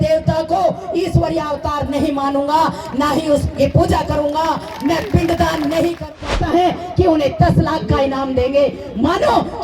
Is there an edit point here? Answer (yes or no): yes